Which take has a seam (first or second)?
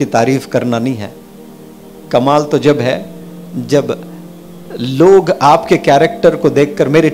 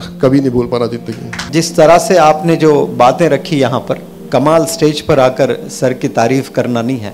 second